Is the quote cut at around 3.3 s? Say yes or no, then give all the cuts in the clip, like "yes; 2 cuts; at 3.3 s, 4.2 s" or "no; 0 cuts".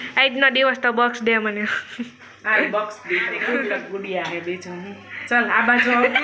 yes; 1 cut; at 3.3 s